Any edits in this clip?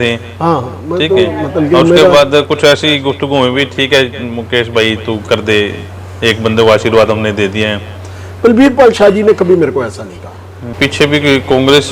yes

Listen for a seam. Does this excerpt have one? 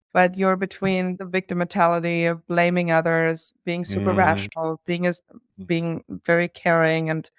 no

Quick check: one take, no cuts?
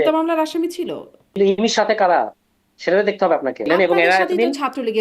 no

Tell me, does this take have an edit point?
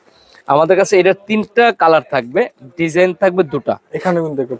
no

